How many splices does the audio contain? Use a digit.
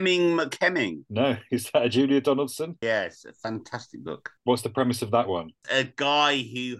4